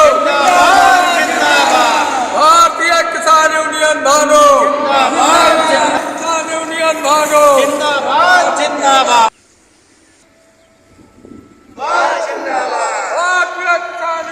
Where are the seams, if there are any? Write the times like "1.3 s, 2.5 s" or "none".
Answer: 9.3 s, 11.8 s

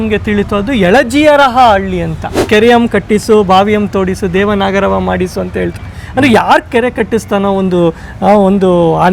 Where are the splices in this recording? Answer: 2.4 s

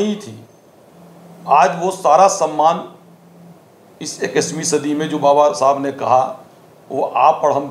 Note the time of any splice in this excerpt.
none

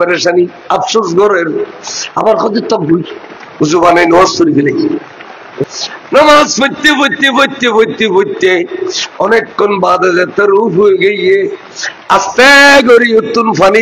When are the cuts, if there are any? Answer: 5.5 s

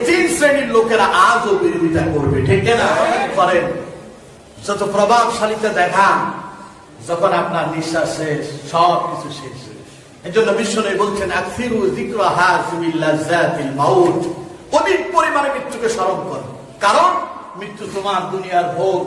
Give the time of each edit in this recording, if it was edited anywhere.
3.1 s

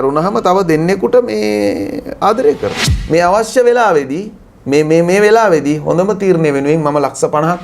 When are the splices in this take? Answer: 2.9 s

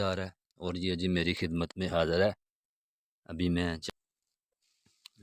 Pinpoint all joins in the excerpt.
3.8 s

